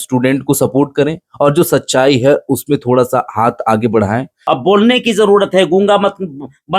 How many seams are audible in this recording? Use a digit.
1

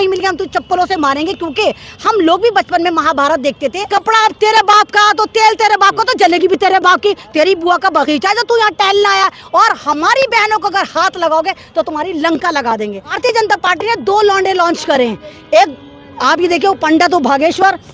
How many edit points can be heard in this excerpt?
2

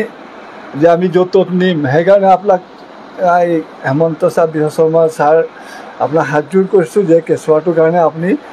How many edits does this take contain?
0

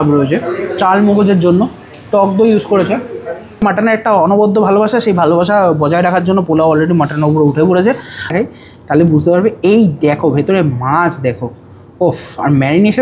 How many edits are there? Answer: 2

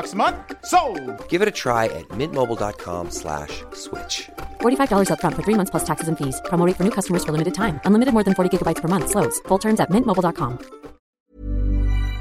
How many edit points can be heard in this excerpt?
1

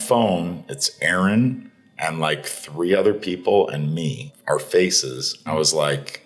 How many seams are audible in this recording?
2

